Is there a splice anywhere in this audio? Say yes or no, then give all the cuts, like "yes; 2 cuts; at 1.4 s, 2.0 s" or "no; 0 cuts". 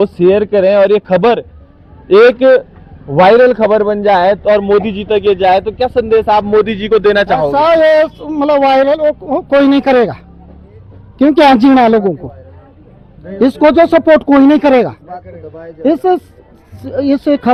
no; 0 cuts